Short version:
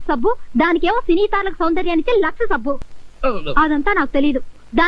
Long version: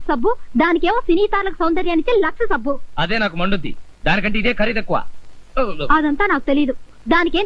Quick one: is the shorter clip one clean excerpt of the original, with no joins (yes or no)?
no